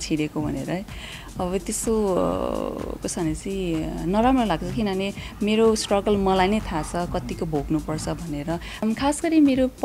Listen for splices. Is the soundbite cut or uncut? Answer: cut